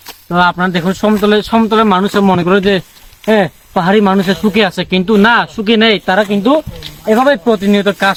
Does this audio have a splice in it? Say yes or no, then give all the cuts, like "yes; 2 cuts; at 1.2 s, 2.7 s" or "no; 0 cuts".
no; 0 cuts